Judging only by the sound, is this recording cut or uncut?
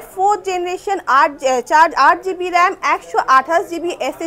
uncut